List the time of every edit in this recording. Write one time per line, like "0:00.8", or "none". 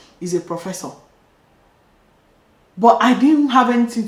none